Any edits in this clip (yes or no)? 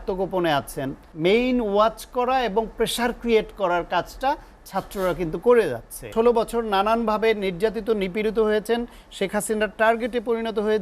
yes